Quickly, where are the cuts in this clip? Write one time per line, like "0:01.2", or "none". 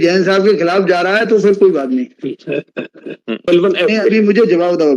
0:03.5